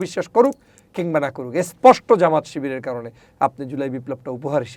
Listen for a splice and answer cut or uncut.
uncut